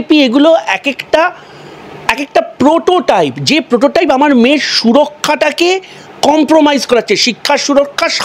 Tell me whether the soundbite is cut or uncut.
uncut